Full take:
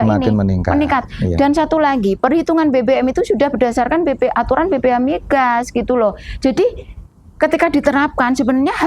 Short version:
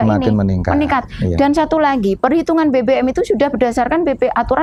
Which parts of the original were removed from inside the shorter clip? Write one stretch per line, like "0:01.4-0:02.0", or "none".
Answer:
none